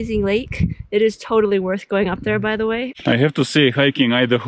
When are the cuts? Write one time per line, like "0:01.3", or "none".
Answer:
0:02.9

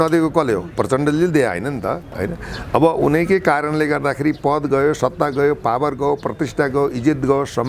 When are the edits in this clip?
none

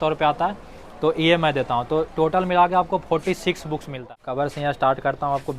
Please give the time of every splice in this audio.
0:03.9

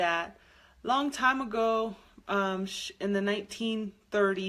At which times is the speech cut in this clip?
none

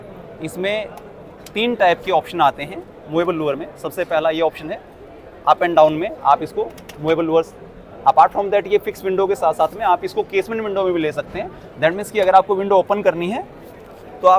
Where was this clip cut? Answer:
none

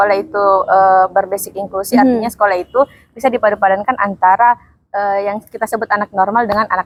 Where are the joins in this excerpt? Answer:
none

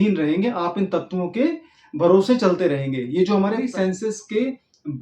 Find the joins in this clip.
0:03.6

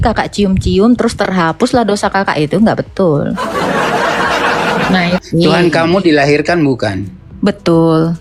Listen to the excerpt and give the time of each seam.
0:05.2

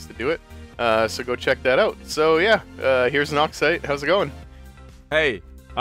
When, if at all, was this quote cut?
0:04.3

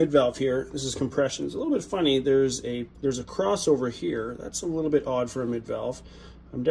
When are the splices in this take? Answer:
0:02.9

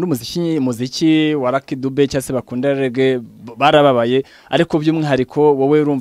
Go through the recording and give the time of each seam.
none

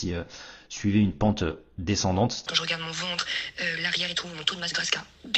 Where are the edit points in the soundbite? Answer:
0:02.4

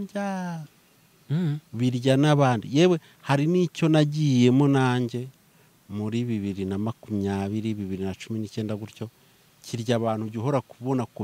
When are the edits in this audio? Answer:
none

